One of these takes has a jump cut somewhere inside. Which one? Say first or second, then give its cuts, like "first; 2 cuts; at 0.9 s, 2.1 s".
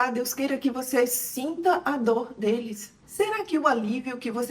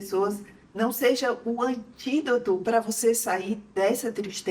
first; 1 cut; at 2.9 s